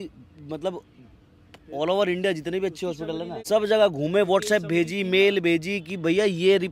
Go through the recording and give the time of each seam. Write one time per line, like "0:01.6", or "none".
0:03.3